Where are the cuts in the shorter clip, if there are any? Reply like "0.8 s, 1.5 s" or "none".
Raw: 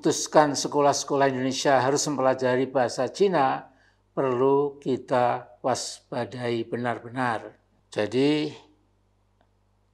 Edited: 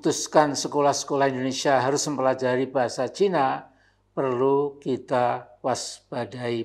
none

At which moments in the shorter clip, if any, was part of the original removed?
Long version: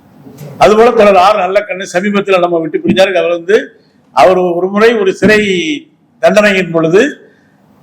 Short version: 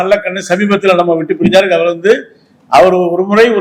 none

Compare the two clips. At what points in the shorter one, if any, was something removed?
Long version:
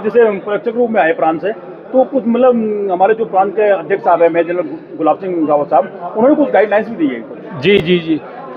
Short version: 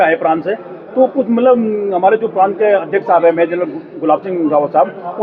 none

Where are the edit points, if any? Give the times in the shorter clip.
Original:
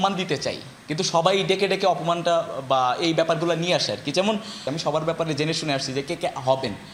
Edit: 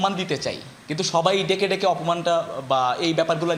none

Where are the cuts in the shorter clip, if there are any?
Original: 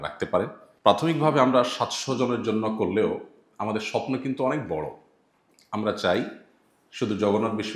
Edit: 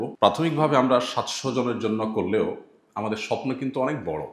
none

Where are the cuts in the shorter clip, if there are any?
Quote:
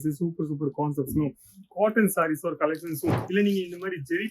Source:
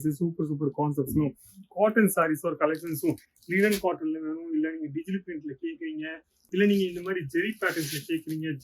3.2 s

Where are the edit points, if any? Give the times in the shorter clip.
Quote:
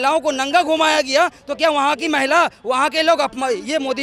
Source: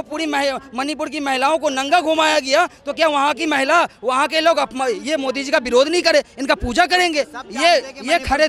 none

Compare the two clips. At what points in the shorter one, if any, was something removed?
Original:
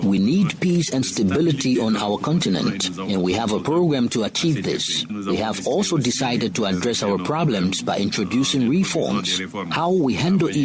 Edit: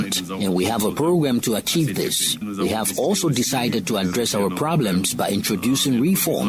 none

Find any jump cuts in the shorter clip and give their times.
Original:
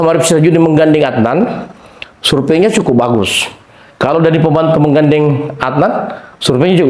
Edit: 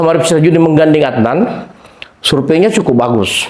none

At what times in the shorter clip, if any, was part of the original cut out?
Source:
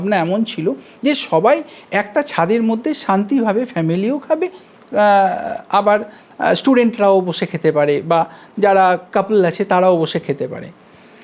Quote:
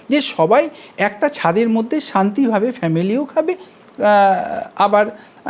none

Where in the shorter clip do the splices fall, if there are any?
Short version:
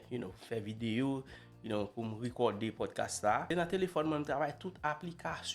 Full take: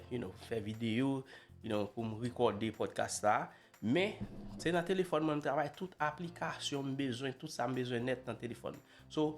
3.5 s

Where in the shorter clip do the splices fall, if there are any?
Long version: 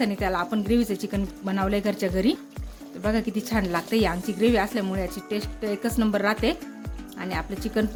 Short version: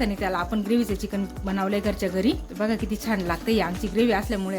2.5 s

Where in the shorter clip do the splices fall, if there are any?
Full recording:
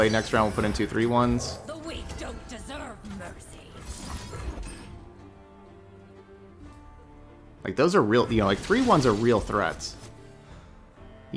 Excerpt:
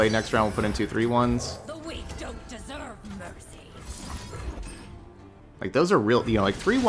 5.4 s

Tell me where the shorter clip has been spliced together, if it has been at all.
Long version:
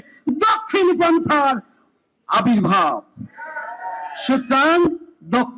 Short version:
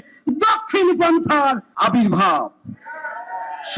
1.7 s

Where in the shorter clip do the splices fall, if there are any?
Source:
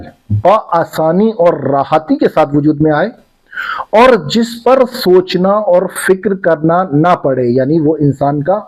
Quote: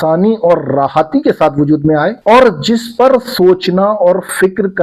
2.2 s

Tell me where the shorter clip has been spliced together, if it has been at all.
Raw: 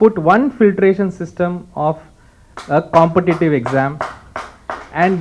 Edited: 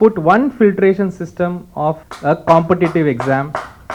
2.1 s

